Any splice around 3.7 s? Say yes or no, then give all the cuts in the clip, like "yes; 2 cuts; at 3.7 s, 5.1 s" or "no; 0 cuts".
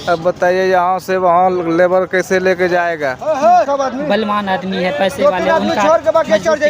yes; 1 cut; at 3.7 s